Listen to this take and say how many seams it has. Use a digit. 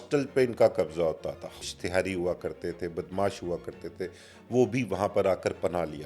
1